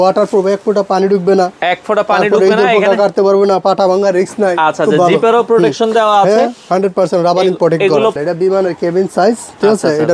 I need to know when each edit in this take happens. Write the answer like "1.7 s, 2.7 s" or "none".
8.2 s